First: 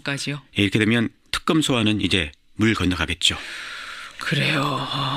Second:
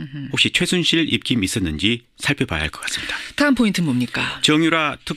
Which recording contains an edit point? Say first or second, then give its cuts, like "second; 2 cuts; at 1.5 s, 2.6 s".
first; 1 cut; at 3.1 s